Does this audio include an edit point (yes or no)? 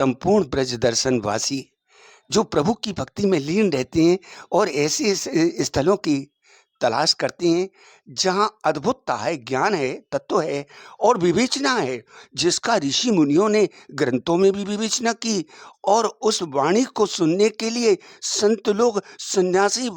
no